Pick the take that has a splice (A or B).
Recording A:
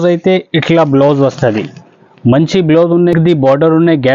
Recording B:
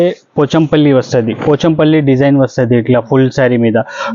A